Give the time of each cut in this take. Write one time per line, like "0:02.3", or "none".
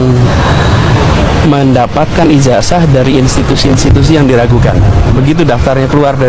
none